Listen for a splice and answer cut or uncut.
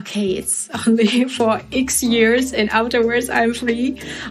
uncut